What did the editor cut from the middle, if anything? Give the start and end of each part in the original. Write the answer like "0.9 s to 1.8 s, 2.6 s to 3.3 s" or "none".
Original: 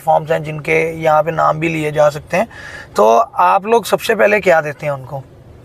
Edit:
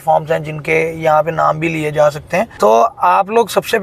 2.5 s to 2.9 s